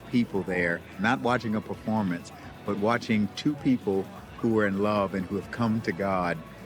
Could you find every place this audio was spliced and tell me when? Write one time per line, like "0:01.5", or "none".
0:01.0